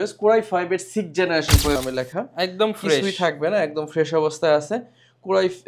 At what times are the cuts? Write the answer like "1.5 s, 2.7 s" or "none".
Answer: 1.8 s